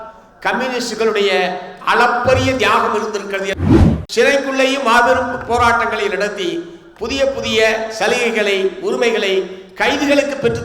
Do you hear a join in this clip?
yes; 1 cut; at 3.6 s

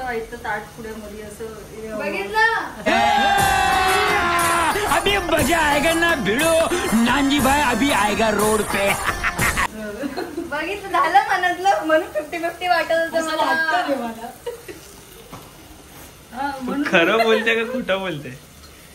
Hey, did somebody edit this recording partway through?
no; 0 cuts

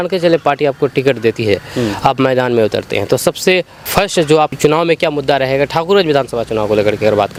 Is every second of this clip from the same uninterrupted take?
yes; 0 cuts

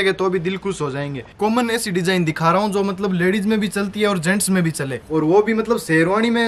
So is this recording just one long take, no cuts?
no; 2 cuts; at 1.3 s, 4.9 s

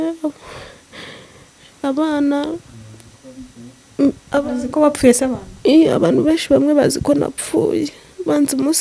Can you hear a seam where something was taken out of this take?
no; 0 cuts

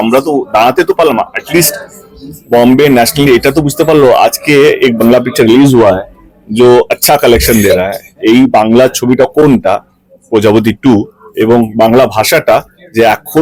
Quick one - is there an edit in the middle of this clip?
no; 0 cuts

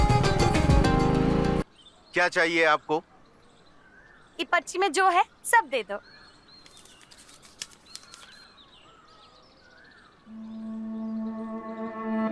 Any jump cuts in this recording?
yes; 1 cut; at 1.6 s

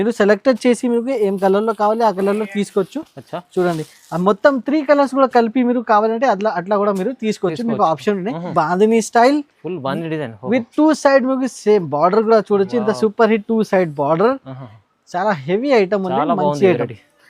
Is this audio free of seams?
no; 1 cut; at 8.5 s

